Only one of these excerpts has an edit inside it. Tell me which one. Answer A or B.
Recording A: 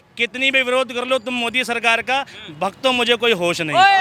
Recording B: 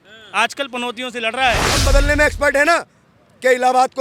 B